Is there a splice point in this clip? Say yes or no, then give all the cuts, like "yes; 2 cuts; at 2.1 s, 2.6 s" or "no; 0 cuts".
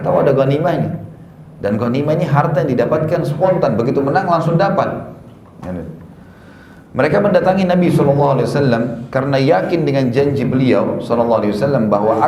no; 0 cuts